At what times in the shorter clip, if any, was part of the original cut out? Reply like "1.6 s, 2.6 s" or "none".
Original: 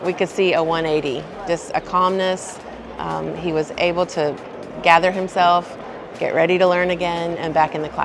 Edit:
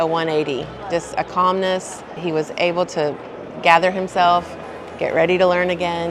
2.1 s